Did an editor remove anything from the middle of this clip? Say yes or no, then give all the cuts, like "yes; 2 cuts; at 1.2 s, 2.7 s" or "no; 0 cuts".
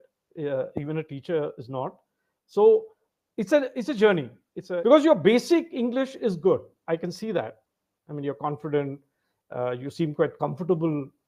yes; 1 cut; at 4.7 s